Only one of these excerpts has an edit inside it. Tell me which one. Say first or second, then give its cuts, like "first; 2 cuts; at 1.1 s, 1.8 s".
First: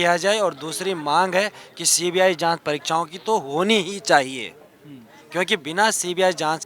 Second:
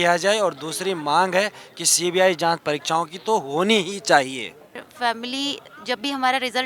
second; 1 cut; at 4.8 s